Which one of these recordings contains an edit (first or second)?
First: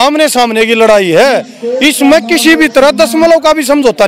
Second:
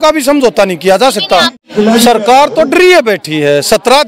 second